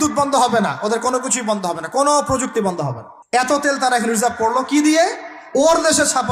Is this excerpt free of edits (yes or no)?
no